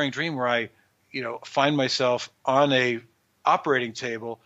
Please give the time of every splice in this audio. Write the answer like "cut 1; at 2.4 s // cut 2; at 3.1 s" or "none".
cut 1; at 1.0 s

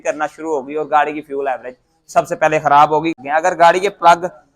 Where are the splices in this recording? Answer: cut 1; at 3.2 s

